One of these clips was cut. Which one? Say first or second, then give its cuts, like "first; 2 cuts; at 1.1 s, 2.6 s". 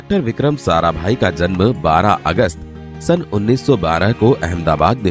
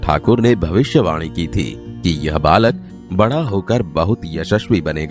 second; 1 cut; at 1.8 s